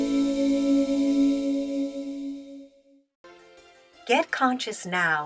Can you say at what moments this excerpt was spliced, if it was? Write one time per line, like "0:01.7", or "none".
0:04.0

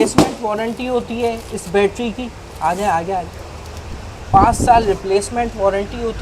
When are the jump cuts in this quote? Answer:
none

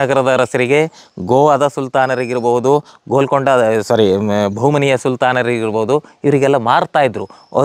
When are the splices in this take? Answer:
none

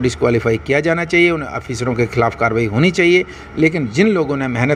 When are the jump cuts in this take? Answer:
none

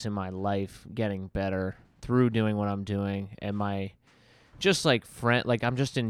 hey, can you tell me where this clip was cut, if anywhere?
none

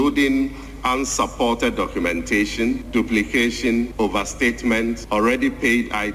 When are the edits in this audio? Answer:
0:02.8
0:03.9
0:05.0

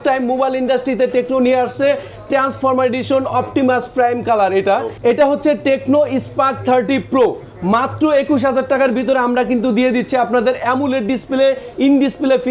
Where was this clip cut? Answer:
none

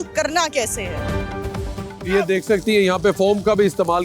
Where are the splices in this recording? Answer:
none

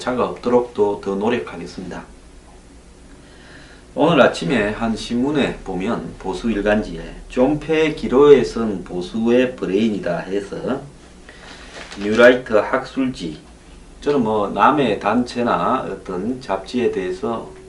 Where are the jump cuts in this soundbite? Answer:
0:04.0

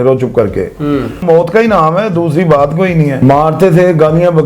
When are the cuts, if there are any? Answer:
0:01.2
0:03.2

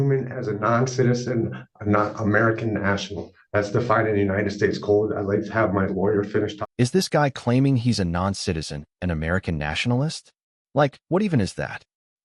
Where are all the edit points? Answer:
none

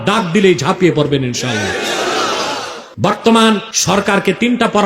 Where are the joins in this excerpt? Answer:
0:02.8
0:03.7

